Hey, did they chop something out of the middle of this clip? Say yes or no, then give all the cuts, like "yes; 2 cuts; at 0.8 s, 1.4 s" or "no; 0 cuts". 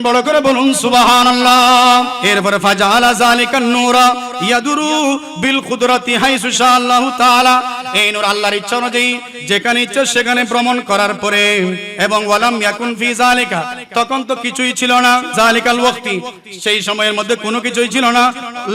yes; 3 cuts; at 2.2 s, 11.9 s, 15.3 s